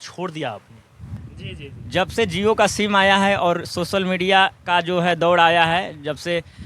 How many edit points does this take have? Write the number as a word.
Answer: one